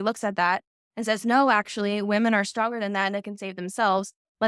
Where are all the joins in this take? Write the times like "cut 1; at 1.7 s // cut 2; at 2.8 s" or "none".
none